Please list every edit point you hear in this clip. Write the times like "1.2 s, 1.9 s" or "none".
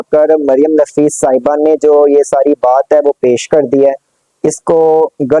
none

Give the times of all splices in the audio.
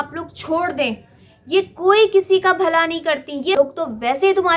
3.5 s

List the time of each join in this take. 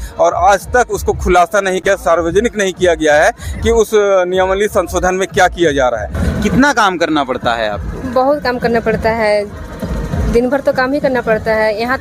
6.1 s

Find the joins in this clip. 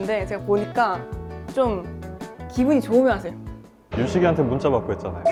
none

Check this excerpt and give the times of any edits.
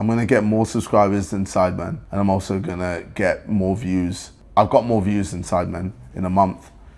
none

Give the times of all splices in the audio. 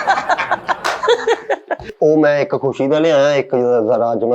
1.8 s

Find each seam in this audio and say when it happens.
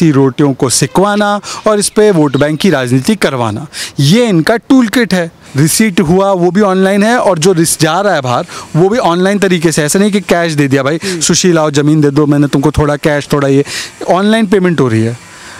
5.4 s

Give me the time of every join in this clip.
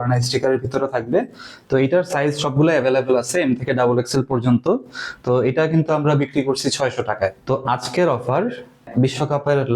7.4 s, 8.9 s

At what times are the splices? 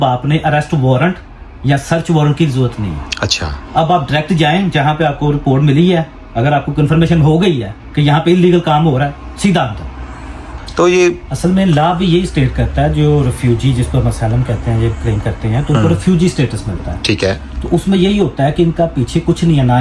10.5 s

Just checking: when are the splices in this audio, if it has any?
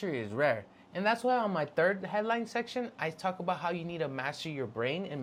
none

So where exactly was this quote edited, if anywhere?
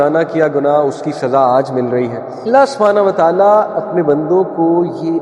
2.5 s

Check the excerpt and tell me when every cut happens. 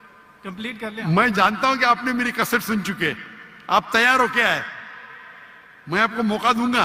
none

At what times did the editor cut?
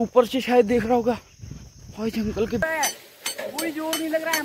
2.6 s

